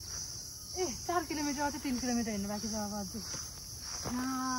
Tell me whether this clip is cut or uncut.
uncut